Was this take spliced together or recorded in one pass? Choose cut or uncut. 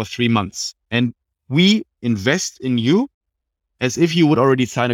uncut